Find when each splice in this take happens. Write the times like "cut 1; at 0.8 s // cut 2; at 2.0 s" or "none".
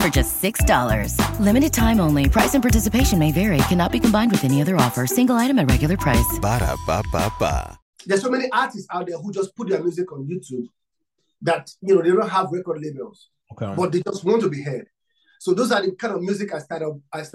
cut 1; at 7.8 s